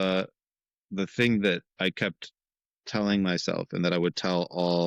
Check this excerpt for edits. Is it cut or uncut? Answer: uncut